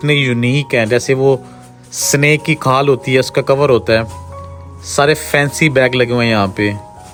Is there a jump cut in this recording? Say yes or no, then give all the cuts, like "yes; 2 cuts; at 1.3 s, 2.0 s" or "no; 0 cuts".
no; 0 cuts